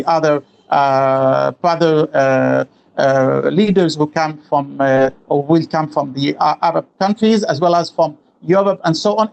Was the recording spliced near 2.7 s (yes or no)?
no